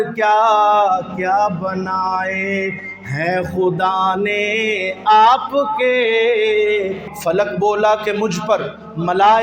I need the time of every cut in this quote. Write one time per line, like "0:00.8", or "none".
0:07.0